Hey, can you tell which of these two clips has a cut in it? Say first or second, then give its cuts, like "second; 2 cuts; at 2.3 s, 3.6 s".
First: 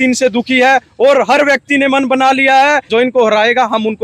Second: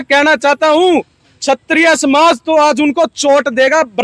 first; 1 cut; at 2.8 s